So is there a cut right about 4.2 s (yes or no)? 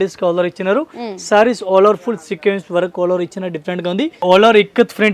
yes